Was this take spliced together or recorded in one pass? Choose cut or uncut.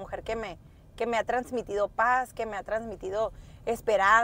uncut